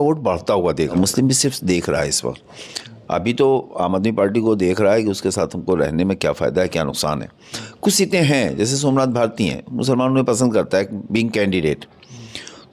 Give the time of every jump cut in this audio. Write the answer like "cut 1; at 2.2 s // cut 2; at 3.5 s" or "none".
cut 1; at 0.9 s